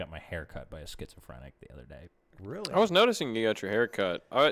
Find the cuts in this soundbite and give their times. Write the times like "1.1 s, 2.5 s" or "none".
none

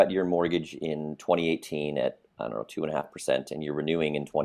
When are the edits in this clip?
none

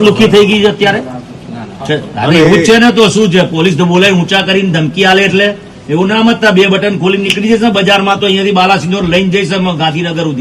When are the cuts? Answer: none

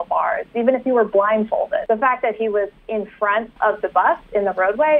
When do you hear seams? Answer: 1.8 s, 3.5 s

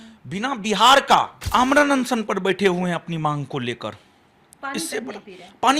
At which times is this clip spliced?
1.4 s

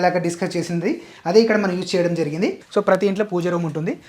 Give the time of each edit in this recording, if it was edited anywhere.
2.6 s

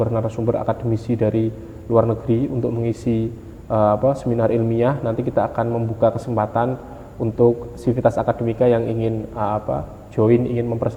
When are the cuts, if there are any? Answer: none

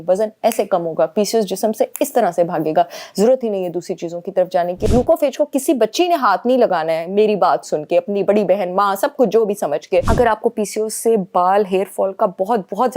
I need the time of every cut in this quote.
4.9 s, 10.1 s

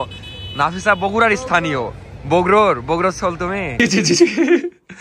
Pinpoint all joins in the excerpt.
3.7 s

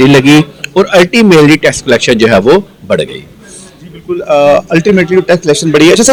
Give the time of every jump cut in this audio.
none

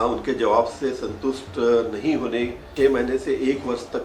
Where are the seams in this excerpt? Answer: 2.7 s

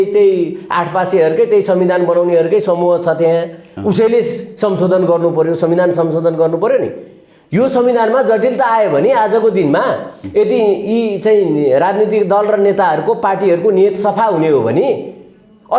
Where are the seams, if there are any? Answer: none

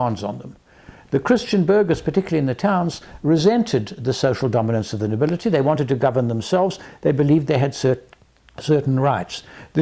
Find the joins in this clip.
none

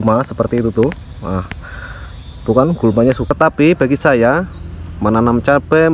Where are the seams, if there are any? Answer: 3.3 s

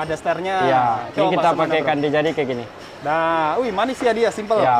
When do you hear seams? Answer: none

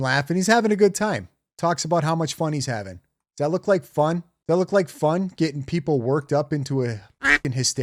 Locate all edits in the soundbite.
none

